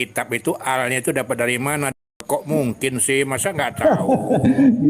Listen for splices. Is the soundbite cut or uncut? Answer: cut